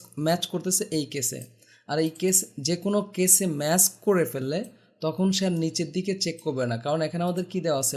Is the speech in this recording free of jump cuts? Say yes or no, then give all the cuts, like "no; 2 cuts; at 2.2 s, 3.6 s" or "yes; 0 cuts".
yes; 0 cuts